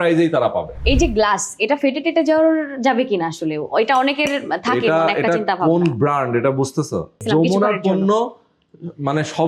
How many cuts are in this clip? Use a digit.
2